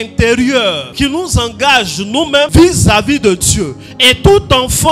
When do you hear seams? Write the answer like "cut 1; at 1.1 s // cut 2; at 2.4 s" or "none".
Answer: cut 1; at 0.8 s // cut 2; at 2.5 s